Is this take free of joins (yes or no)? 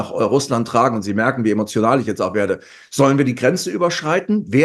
yes